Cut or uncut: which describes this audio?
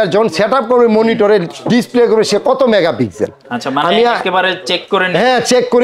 uncut